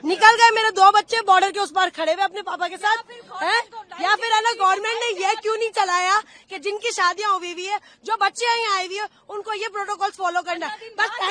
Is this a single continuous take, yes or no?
yes